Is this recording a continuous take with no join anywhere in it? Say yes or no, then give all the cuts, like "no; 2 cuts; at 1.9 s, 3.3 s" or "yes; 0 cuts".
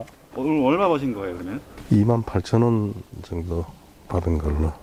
yes; 0 cuts